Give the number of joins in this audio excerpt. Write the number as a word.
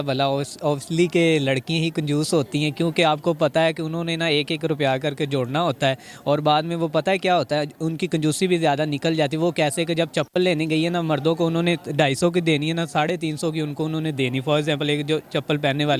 zero